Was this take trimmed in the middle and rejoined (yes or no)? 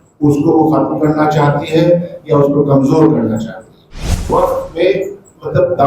yes